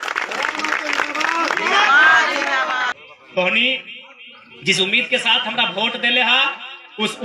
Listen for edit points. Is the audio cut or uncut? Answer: cut